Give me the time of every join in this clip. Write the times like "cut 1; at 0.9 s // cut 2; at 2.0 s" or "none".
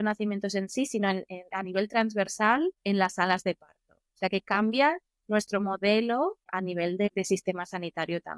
none